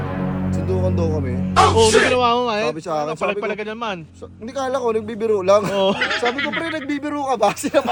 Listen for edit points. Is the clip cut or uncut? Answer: uncut